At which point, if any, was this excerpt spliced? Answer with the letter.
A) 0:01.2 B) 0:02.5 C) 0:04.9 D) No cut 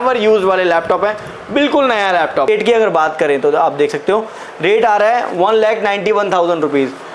B